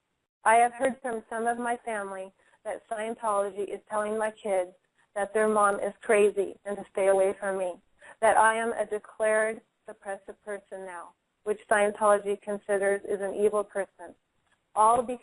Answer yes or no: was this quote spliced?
no